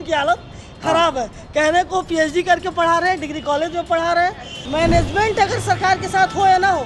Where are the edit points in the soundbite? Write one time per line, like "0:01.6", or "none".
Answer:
0:04.6